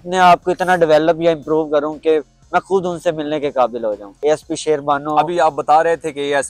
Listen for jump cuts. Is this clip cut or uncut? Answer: cut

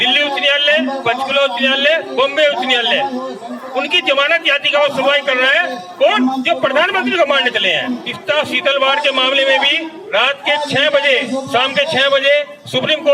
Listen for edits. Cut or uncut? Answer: cut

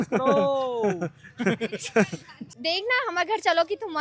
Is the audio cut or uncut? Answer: cut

